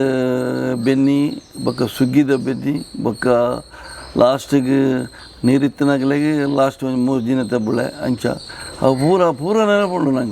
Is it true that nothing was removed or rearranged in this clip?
yes; 0 cuts

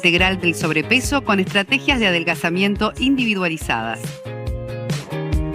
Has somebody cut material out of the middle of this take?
yes; 1 cut; at 4.0 s

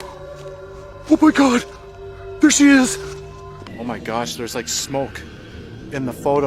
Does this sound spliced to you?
yes; 1 cut; at 3.8 s

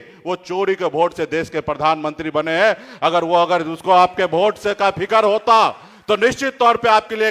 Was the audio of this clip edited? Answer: no; 0 cuts

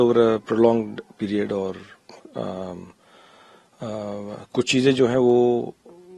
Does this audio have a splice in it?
no; 0 cuts

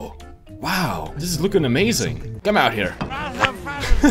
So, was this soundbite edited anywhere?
yes; 1 cut; at 2.3 s

